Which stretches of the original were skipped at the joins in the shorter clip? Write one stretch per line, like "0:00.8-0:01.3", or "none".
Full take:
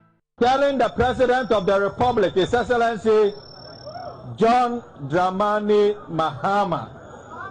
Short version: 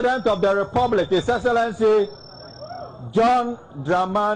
none